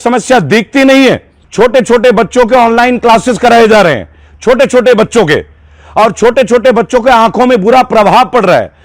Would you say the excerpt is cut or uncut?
cut